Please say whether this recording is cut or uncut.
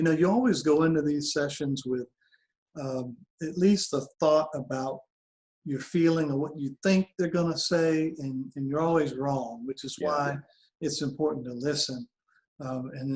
uncut